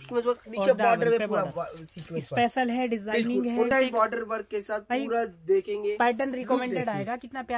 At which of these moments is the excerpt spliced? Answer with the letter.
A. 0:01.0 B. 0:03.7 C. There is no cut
B